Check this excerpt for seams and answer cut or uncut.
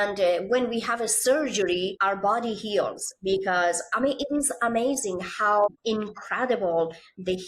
cut